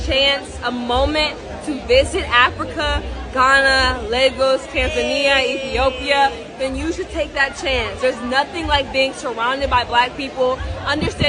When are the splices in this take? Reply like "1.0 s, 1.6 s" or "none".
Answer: none